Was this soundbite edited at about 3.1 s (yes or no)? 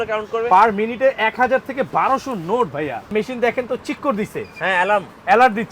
yes